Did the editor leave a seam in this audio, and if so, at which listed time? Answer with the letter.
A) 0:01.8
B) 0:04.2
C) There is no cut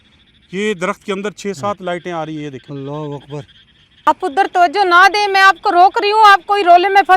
B